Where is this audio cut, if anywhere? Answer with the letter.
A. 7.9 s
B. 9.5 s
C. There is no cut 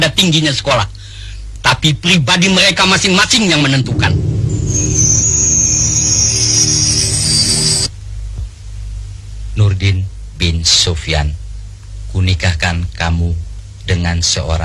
A